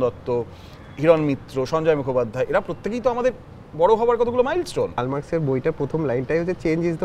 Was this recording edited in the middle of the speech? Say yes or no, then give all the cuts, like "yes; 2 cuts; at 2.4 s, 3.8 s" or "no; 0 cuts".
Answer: yes; 1 cut; at 5.0 s